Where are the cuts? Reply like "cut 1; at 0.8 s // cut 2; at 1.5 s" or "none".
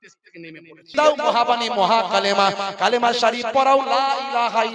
cut 1; at 0.9 s

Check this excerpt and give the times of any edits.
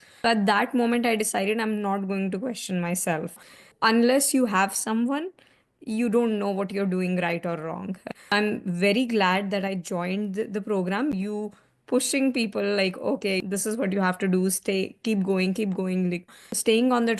cut 1; at 3.4 s // cut 2; at 11.2 s

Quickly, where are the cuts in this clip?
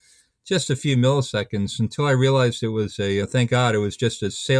none

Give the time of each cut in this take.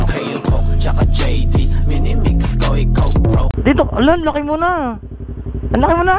cut 1; at 3.6 s // cut 2; at 5.0 s

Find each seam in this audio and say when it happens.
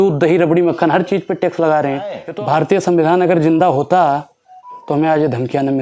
cut 1; at 2.2 s

